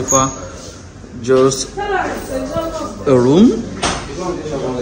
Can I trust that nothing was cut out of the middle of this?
yes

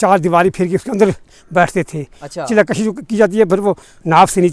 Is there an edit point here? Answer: no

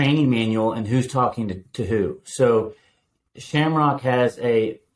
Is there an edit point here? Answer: no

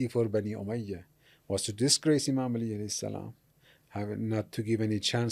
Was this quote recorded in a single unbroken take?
yes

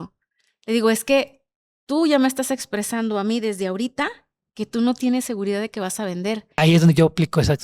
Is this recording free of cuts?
no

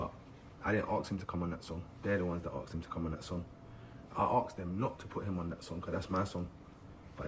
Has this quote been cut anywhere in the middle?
yes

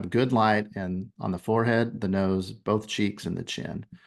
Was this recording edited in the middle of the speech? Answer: no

